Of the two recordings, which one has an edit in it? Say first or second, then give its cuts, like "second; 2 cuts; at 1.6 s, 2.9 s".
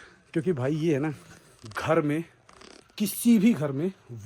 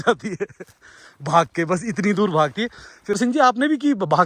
second; 1 cut; at 3.2 s